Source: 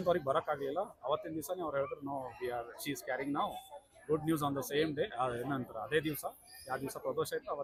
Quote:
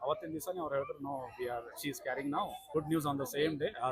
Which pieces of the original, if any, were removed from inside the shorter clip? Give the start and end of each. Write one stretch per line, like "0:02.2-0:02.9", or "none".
0:03.7-0:04.0